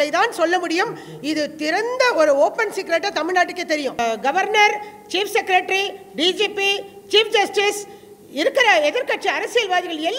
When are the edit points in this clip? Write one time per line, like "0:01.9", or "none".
0:04.0